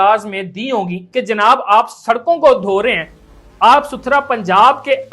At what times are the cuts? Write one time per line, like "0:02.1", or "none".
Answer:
0:01.0

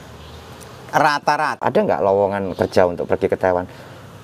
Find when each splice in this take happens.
0:01.6

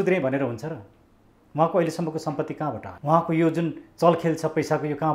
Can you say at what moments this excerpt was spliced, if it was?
0:02.9

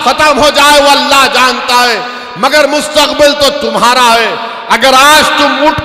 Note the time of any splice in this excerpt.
none

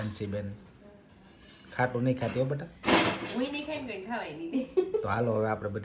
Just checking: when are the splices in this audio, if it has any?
none

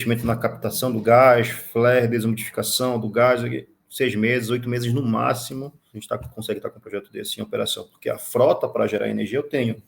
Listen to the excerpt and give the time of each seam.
0:05.9

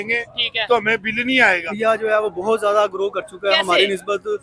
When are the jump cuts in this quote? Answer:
0:01.7

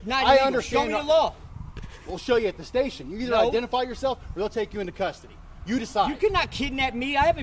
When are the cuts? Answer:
none

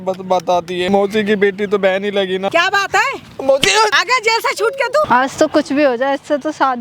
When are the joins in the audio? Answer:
0:00.9
0:02.5
0:04.0
0:05.1

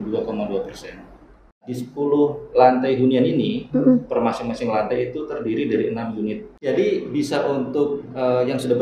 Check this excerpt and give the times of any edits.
0:01.6
0:06.6

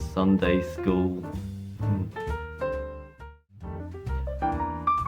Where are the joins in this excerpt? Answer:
0:03.2

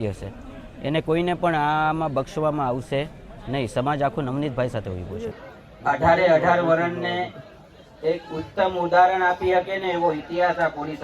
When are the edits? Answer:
0:05.4

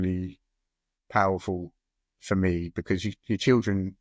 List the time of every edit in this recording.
none

